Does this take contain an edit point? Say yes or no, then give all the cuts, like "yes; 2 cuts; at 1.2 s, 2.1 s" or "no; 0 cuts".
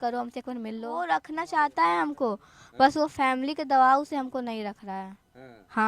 yes; 1 cut; at 1.0 s